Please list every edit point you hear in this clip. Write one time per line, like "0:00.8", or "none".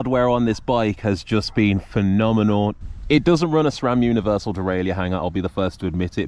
0:02.8